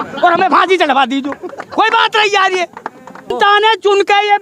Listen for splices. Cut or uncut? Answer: cut